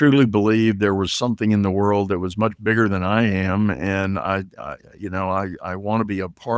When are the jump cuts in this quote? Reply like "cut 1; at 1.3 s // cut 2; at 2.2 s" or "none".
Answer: none